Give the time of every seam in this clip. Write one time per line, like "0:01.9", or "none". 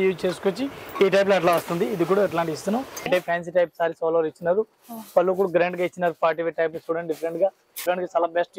0:03.1
0:07.8